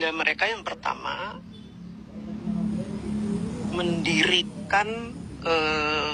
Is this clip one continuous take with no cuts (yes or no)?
yes